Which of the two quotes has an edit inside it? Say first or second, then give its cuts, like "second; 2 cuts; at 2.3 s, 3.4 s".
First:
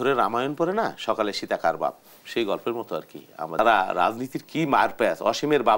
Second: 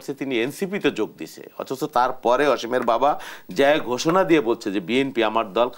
first; 1 cut; at 3.6 s